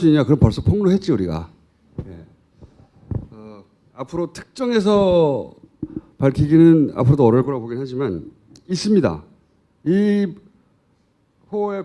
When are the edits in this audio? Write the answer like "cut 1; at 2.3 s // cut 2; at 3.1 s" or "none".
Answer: cut 1; at 1.9 s